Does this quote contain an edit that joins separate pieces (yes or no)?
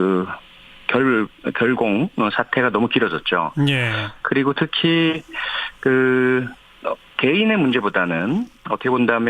yes